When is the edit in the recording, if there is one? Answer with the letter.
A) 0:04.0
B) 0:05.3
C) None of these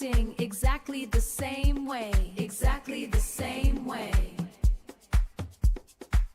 C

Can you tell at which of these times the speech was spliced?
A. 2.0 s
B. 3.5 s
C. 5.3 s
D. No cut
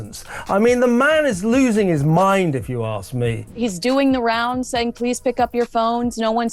B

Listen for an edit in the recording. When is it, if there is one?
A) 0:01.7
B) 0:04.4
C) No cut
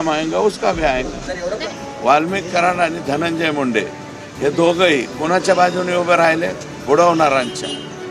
A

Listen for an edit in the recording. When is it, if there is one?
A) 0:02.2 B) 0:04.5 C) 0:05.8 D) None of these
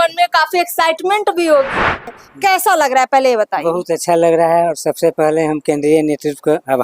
A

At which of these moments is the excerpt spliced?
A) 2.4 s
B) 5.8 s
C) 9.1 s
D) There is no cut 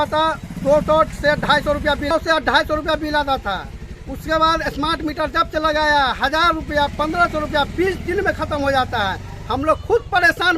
D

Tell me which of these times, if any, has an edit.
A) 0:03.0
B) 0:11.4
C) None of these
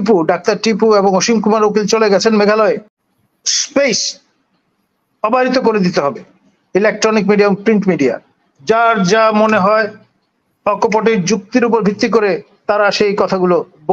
A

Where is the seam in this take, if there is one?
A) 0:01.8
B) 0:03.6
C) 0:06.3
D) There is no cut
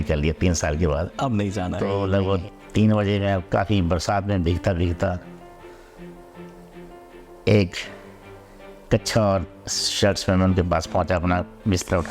A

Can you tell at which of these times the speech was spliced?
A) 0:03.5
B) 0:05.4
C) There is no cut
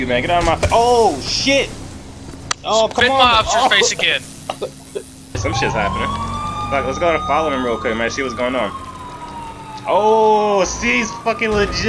B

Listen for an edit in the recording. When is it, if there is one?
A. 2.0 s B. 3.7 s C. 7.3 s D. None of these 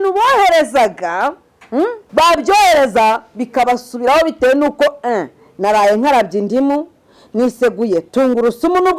A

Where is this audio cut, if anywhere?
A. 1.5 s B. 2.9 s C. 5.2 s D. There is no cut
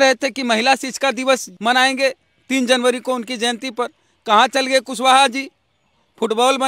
A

